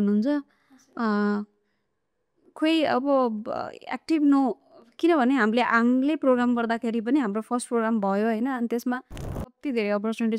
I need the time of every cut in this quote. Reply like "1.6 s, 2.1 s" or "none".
9.5 s

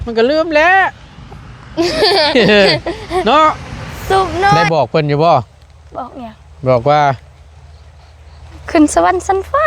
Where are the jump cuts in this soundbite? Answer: 4.6 s

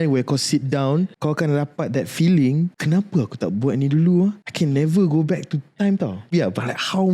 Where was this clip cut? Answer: 1.1 s, 2.8 s, 4.5 s, 6.3 s

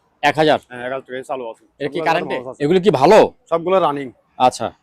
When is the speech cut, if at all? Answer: 2.3 s

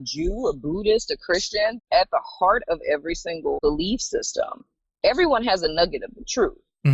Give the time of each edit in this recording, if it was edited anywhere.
1.8 s, 3.6 s

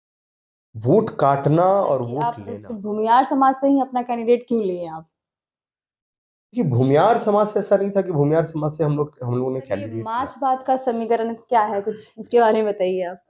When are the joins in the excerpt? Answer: 2.5 s, 10.2 s

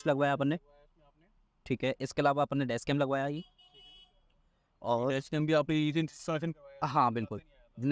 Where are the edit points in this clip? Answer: none

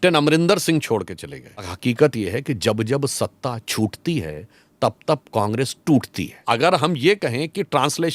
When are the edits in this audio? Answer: 1.7 s, 6.4 s

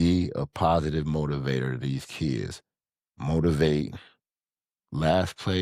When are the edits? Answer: none

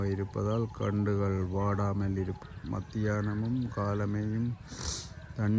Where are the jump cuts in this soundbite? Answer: 2.4 s

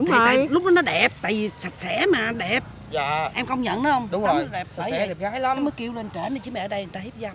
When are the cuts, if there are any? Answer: none

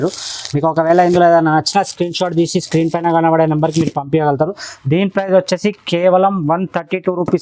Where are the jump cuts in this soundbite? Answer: none

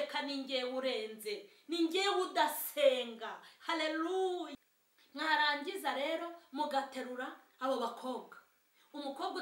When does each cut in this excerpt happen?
4.5 s

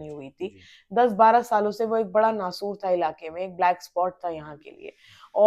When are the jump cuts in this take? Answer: none

